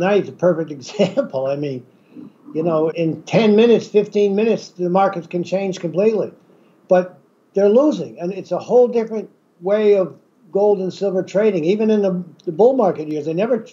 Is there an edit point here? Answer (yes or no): yes